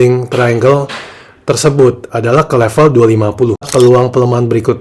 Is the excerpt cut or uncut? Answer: cut